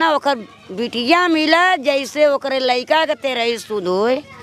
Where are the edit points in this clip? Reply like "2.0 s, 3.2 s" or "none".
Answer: none